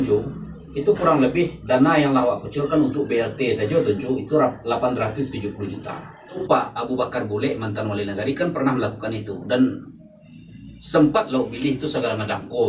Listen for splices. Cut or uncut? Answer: cut